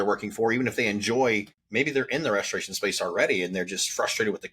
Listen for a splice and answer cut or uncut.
cut